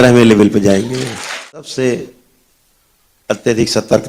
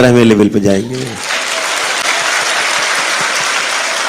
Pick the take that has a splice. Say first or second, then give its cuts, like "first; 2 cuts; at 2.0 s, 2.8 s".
first; 1 cut; at 1.6 s